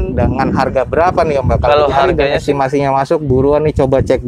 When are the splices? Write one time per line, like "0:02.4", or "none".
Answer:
0:02.2